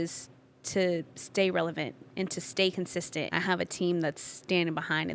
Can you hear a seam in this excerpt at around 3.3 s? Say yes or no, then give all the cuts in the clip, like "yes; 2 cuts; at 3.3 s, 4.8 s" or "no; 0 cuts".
yes; 1 cut; at 3.3 s